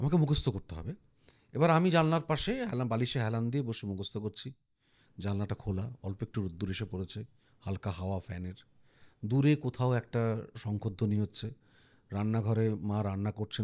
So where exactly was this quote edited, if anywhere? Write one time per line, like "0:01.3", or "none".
none